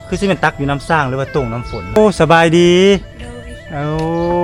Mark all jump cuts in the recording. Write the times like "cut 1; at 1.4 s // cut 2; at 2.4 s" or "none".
cut 1; at 2.0 s